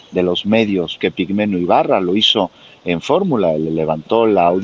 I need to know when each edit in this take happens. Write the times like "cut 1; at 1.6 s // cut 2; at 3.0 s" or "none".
cut 1; at 1.0 s

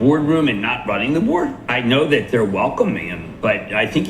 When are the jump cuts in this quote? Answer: cut 1; at 1.6 s

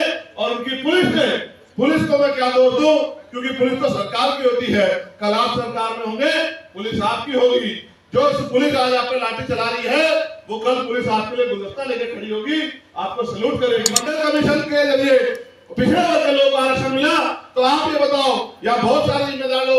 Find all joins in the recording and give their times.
cut 1; at 14.1 s

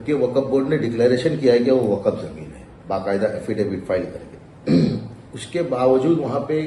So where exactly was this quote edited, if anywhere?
none

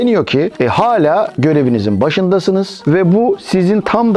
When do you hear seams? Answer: cut 1; at 1.3 s // cut 2; at 2.8 s

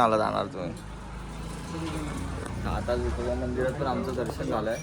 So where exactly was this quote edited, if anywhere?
none

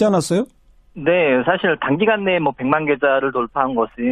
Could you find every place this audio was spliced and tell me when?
none

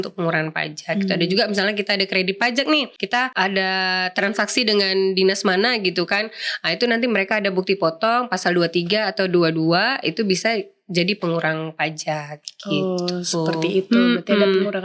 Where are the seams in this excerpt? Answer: cut 1; at 2.9 s

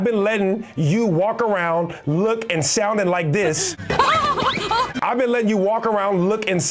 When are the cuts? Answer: none

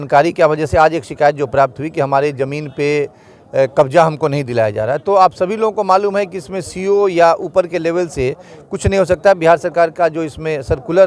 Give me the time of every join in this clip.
none

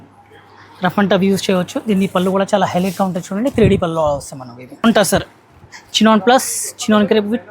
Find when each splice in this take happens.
cut 1; at 4.8 s

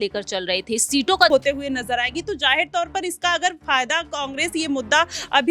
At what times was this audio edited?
cut 1; at 1.3 s

